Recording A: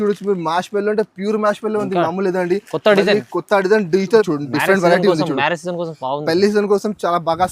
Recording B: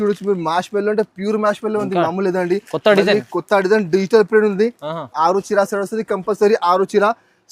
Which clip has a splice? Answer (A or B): A